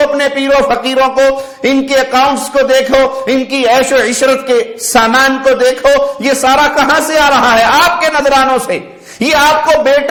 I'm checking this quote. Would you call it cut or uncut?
uncut